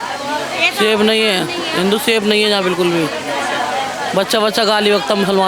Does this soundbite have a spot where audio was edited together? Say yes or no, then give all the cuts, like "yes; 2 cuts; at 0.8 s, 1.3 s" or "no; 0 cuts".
no; 0 cuts